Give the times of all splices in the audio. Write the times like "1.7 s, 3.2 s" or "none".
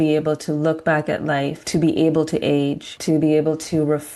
1.6 s, 2.9 s